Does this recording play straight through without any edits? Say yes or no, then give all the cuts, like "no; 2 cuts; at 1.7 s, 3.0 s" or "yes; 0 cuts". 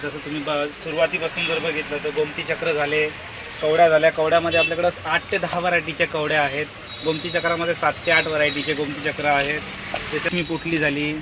no; 1 cut; at 10.3 s